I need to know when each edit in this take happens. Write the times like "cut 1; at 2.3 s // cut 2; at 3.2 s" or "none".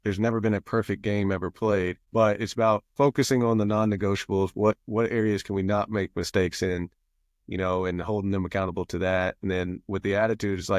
cut 1; at 2.9 s